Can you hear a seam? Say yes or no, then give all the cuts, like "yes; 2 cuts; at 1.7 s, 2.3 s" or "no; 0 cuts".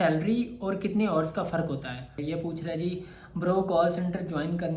yes; 1 cut; at 2.2 s